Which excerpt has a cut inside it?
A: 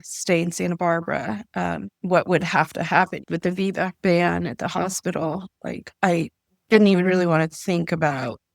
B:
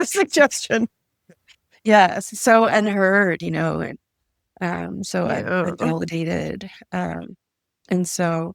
A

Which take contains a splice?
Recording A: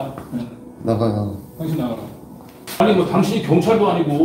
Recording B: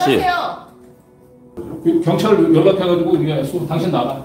A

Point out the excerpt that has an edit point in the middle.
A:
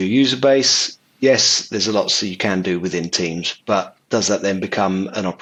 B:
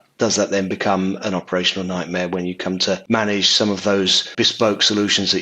B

